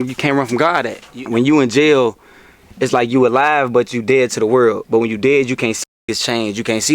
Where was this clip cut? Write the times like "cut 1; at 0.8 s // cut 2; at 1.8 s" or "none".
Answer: cut 1; at 1.1 s